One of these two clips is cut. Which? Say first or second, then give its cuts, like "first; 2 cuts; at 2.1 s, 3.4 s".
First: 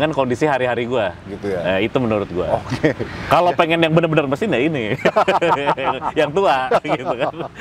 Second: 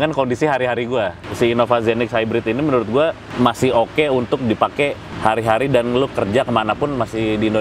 second; 3 cuts; at 1.2 s, 3.2 s, 5.1 s